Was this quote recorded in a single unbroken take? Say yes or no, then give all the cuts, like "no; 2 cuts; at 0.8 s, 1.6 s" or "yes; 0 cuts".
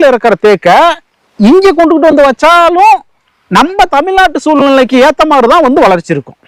yes; 0 cuts